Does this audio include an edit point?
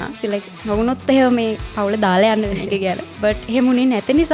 yes; 1 cut; at 3.1 s

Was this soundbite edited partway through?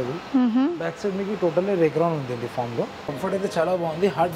yes; 1 cut; at 3.1 s

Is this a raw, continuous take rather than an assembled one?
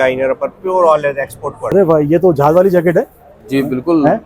no; 1 cut; at 1.7 s

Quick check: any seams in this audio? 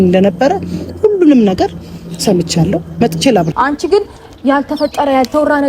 yes; 1 cut; at 3.5 s

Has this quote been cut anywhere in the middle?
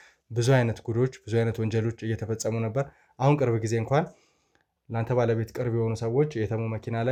no; 0 cuts

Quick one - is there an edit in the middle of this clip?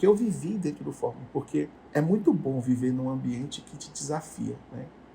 yes; 1 cut; at 1.8 s

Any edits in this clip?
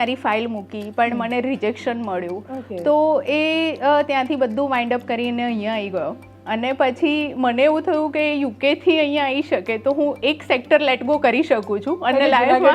no; 0 cuts

